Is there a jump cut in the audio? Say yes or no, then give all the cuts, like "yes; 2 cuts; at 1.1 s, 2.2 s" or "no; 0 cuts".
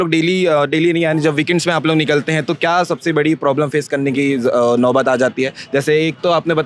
no; 0 cuts